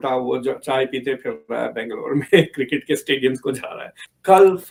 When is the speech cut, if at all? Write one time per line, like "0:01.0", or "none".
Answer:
none

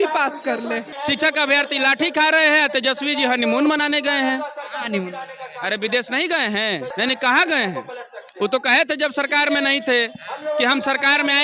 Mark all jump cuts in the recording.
0:00.9
0:06.9

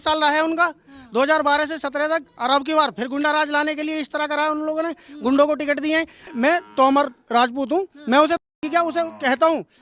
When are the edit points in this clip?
0:06.3

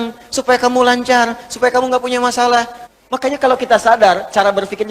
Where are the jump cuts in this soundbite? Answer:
0:02.8

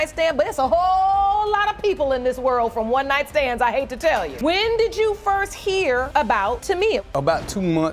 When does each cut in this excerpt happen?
none

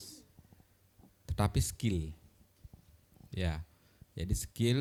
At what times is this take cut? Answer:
none

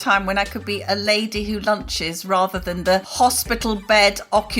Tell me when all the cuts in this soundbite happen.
0:03.1

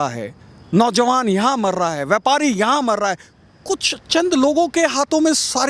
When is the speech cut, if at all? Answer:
none

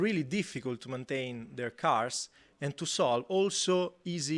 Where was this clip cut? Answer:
none

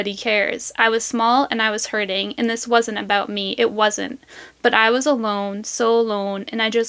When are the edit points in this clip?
none

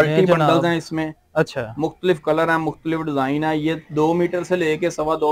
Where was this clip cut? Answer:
none

